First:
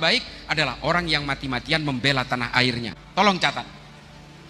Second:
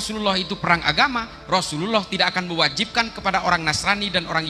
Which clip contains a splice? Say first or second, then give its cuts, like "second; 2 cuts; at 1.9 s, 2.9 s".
first; 1 cut; at 2.9 s